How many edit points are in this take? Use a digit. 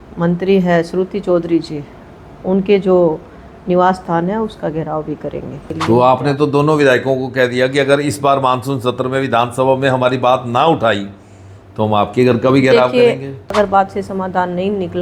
2